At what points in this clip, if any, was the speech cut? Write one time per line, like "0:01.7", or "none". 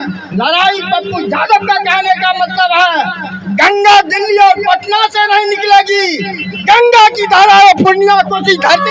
none